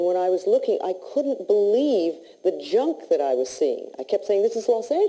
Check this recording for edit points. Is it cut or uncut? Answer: cut